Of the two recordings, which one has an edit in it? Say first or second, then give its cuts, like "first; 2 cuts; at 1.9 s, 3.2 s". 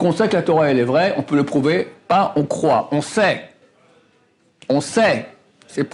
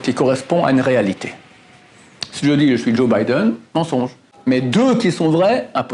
second; 1 cut; at 4.2 s